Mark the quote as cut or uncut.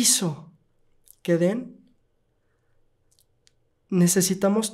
uncut